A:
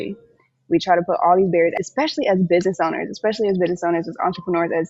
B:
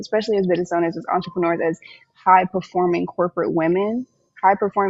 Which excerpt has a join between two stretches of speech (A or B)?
A